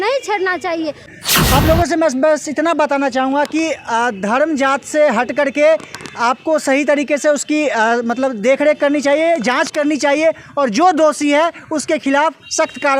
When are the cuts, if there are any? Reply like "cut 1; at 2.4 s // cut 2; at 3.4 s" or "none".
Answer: cut 1; at 1.2 s

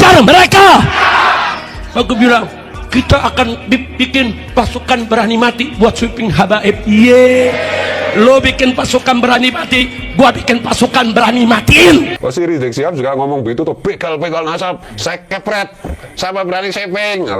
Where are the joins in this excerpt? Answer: cut 1; at 12.1 s

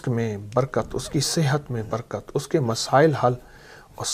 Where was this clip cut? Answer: none

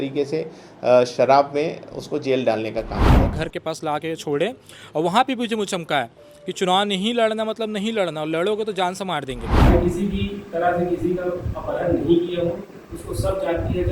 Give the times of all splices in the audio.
cut 1; at 3.3 s // cut 2; at 9.7 s

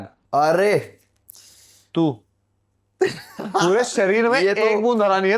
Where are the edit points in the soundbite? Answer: cut 1; at 1.0 s

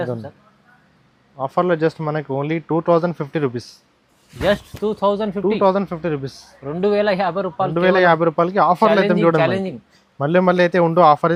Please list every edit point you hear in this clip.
none

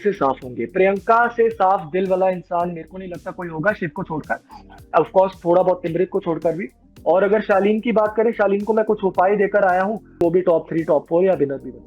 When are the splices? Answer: cut 1; at 6.8 s // cut 2; at 10.2 s

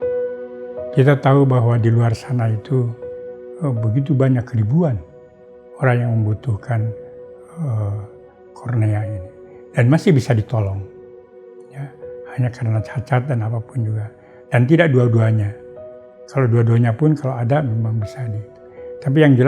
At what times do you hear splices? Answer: cut 1; at 0.9 s

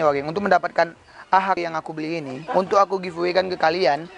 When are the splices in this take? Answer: cut 1; at 1.6 s

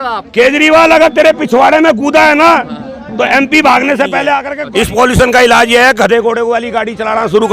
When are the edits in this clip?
cut 1; at 4.5 s

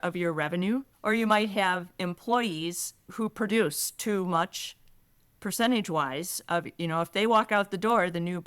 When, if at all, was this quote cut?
cut 1; at 0.9 s // cut 2; at 3.1 s

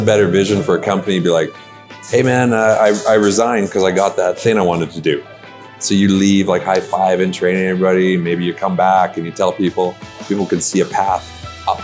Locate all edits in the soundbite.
cut 1; at 4.4 s

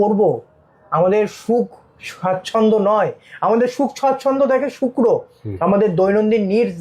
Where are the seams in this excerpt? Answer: none

